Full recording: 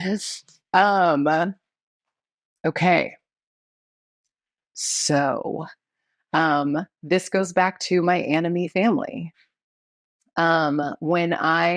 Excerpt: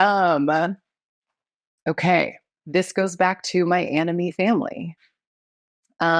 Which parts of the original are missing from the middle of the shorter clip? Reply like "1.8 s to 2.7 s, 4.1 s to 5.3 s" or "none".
3.3 s to 6.9 s

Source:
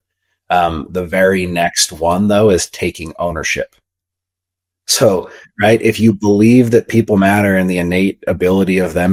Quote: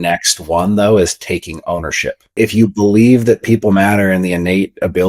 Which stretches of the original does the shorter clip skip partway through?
3.9 s to 5.8 s

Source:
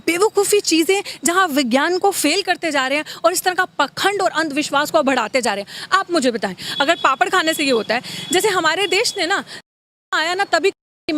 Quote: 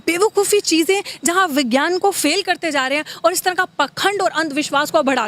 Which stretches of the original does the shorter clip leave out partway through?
none

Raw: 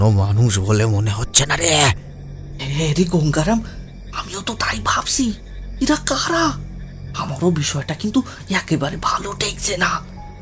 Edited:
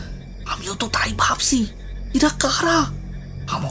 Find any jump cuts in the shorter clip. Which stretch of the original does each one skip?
none

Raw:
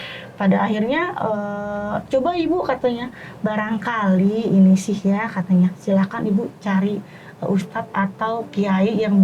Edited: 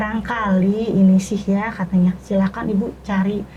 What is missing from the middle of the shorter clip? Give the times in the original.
none

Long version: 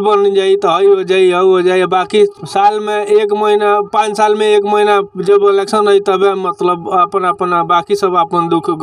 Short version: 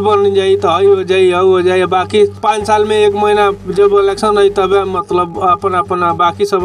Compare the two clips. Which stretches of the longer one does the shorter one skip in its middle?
2.4 s to 3.9 s

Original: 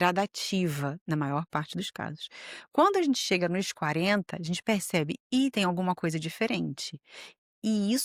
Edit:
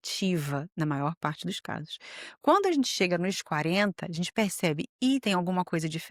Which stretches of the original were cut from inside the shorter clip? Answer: none

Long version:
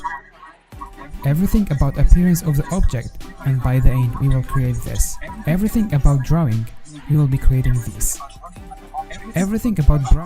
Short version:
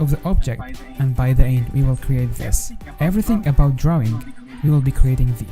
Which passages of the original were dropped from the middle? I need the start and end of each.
none

